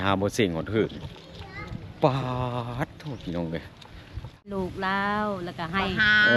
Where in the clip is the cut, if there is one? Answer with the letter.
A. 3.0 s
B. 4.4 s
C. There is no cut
B